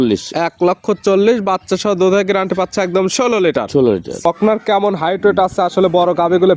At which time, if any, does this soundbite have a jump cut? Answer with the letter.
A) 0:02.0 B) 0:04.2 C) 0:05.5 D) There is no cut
B